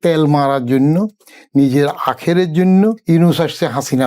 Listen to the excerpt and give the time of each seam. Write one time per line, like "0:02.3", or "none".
0:03.0